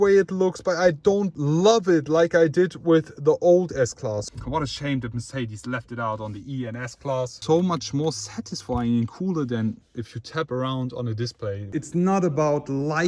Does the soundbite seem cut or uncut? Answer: cut